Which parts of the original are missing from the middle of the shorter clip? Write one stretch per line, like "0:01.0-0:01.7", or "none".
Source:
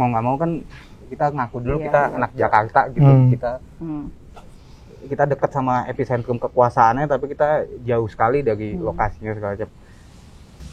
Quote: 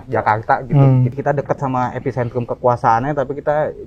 0:03.4-0:05.0